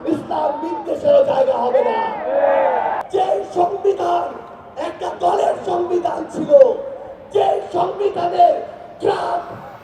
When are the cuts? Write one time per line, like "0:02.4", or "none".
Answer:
0:03.0